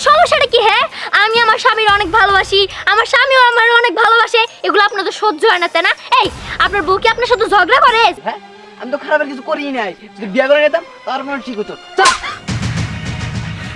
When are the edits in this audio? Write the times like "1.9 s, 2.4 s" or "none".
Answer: 8.2 s